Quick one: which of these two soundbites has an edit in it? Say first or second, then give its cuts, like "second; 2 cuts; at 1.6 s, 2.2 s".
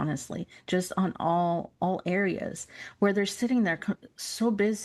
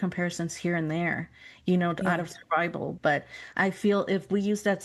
first; 1 cut; at 1.7 s